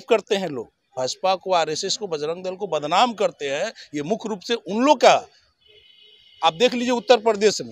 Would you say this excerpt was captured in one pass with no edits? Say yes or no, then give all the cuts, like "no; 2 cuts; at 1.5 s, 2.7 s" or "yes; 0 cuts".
yes; 0 cuts